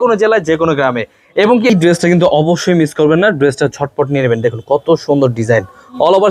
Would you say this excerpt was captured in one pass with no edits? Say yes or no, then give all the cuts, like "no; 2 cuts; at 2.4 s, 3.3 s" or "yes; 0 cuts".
no; 1 cut; at 1.7 s